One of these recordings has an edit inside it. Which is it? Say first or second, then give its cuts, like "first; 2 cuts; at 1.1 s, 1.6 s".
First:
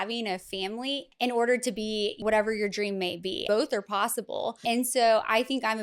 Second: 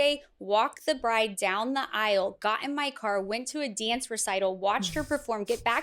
first; 4 cuts; at 1.1 s, 2.2 s, 3.4 s, 4.6 s